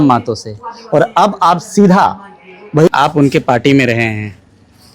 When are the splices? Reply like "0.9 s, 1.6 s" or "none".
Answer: 2.9 s